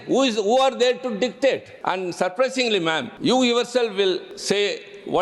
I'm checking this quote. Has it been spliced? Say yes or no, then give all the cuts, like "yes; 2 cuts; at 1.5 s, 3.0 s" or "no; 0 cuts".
yes; 3 cuts; at 1.7 s, 3.1 s, 4.3 s